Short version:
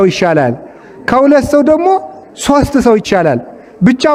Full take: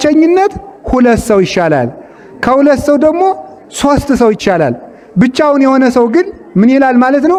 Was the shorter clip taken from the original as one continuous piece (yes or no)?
yes